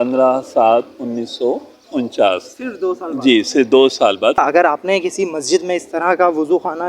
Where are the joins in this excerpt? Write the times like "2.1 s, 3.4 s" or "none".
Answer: 4.4 s